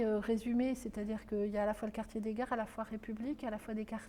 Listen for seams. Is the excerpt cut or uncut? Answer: uncut